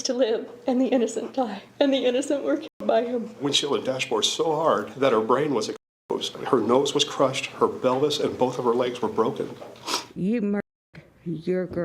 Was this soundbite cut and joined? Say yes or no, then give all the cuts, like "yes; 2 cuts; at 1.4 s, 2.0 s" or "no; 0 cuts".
yes; 5 cuts; at 1.6 s, 3.4 s, 4.9 s, 6.3 s, 10.1 s